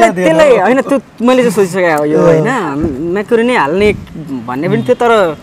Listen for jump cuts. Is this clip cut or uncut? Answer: uncut